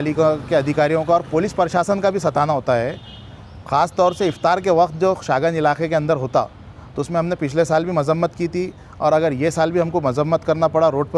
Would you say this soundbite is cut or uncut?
uncut